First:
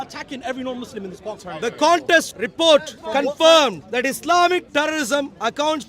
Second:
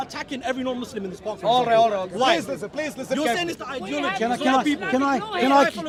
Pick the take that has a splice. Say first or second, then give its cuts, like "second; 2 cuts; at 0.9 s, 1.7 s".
first; 4 cuts; at 1.3 s, 2.4 s, 3.0 s, 3.8 s